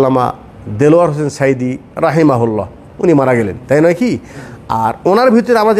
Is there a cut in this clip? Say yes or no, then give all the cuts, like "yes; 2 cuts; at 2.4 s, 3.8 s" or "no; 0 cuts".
no; 0 cuts